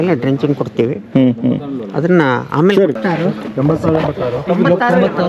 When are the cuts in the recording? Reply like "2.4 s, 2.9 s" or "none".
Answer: none